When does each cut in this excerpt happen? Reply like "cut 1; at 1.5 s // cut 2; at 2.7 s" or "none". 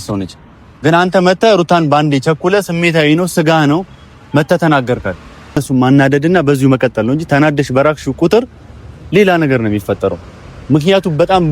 cut 1; at 5.6 s